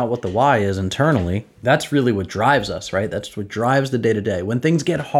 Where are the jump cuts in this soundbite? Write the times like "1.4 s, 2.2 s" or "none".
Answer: 1.5 s